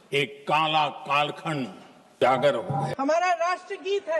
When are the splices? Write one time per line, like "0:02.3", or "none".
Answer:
0:02.2
0:02.9